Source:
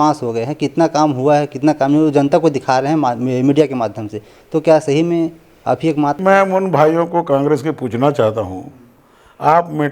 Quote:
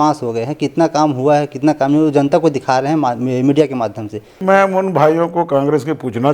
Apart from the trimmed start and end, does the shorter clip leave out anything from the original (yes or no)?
yes